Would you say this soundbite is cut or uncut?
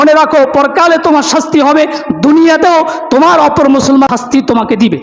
cut